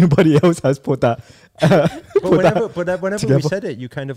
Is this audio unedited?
yes; 0 cuts

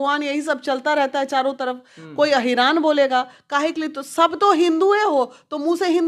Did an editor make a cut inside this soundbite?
no; 0 cuts

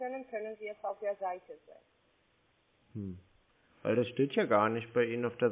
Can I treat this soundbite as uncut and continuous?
yes; 0 cuts

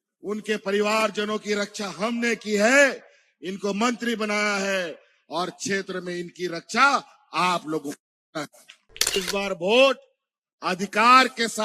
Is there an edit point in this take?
yes; 1 cut; at 9.2 s

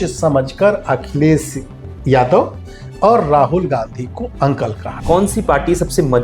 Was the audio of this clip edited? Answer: yes; 1 cut; at 4.9 s

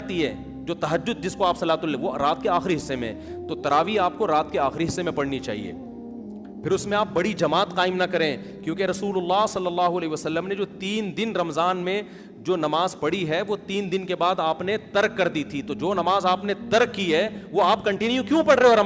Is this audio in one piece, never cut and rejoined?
yes; 0 cuts

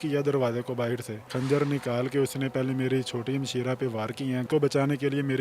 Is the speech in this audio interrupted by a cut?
yes; 2 cuts; at 1.3 s, 4.5 s

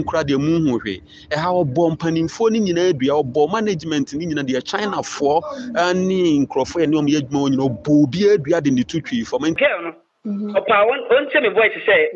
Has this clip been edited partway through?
yes; 1 cut; at 9.6 s

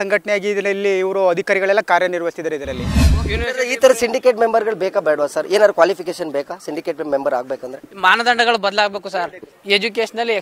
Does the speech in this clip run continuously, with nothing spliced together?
no; 2 cuts; at 3.1 s, 9.5 s

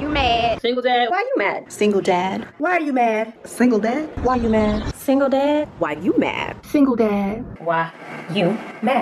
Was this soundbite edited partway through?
no; 0 cuts

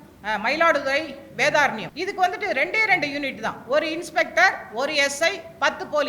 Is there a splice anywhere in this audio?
yes; 1 cut; at 1.9 s

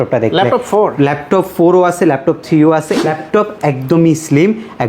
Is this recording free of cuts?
no; 1 cut; at 3.0 s

